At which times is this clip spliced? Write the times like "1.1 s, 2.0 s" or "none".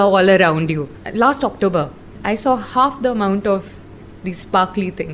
1.0 s, 2.1 s